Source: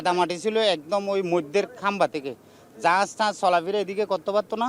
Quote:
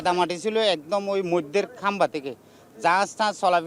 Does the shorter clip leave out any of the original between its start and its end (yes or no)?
no